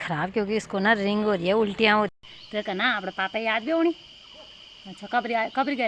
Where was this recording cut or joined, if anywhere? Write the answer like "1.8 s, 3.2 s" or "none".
2.1 s